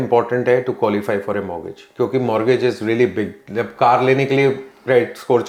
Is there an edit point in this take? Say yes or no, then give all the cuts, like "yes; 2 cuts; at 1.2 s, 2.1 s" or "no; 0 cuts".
no; 0 cuts